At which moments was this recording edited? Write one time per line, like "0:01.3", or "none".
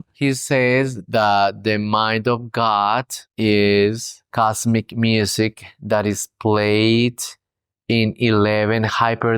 none